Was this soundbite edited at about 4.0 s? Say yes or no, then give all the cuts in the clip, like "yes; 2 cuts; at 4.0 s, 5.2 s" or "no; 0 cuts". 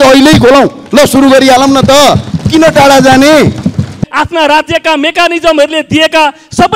yes; 1 cut; at 4.0 s